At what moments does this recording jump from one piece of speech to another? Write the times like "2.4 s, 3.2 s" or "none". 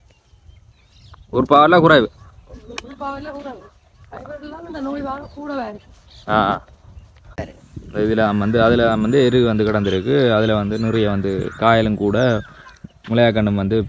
7.5 s